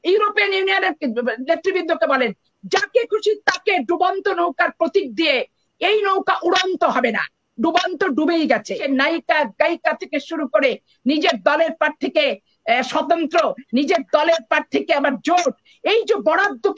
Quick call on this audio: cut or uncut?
cut